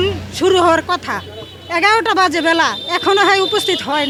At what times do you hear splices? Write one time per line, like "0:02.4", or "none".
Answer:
none